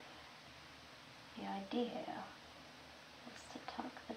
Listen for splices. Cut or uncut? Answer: uncut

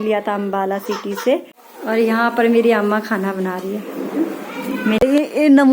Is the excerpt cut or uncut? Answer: cut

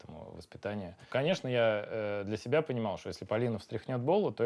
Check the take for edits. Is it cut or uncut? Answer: cut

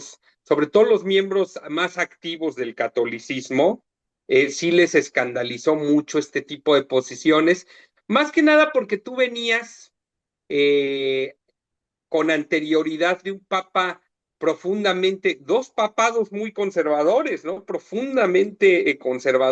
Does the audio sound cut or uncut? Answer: uncut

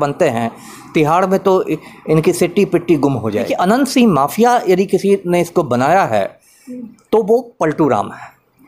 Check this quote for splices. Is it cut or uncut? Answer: cut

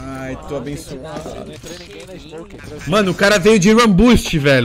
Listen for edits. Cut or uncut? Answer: cut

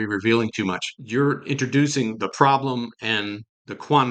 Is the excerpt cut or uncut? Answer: cut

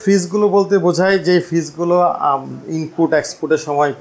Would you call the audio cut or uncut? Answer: uncut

